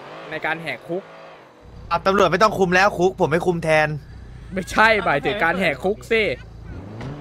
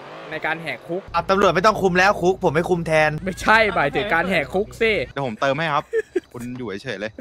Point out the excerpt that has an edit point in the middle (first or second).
second